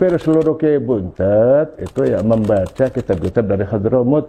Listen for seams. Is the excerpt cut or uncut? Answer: uncut